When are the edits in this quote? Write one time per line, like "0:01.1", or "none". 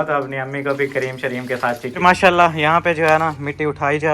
0:02.0